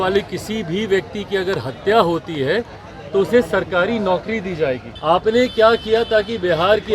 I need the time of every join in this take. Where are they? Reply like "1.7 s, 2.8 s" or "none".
4.9 s